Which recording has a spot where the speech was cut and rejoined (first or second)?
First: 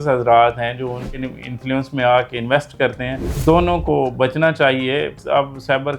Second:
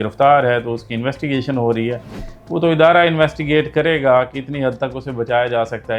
first